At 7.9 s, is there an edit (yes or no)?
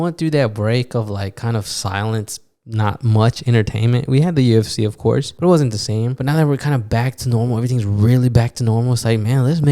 no